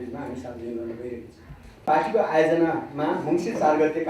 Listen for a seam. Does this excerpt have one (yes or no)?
yes